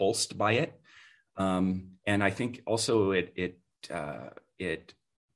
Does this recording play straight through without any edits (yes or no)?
yes